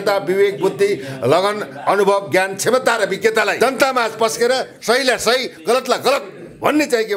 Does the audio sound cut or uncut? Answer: cut